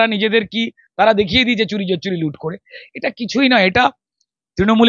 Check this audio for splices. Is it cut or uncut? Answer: uncut